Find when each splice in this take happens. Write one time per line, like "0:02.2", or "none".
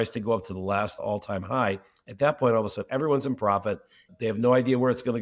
0:01.0
0:04.1